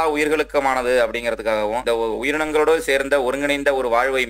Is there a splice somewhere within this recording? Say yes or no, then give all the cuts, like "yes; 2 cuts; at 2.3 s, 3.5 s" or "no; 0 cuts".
yes; 1 cut; at 1.8 s